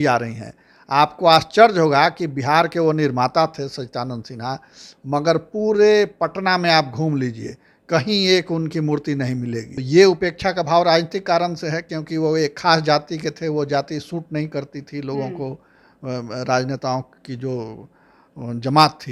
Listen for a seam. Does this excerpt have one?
yes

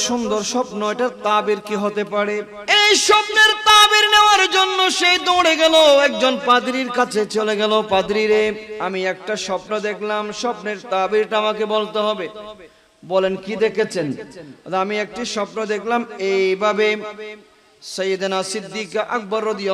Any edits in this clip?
yes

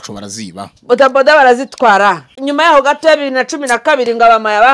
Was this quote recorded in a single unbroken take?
no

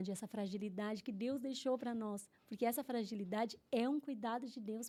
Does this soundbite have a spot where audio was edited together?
no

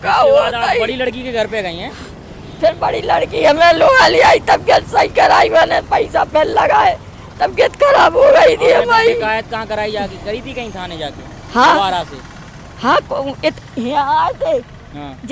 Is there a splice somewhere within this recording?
no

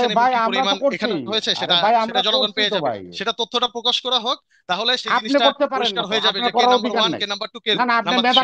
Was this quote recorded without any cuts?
yes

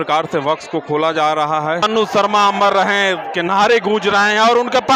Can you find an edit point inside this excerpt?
yes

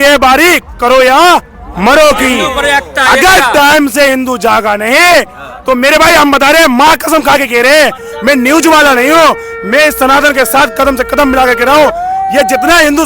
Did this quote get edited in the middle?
no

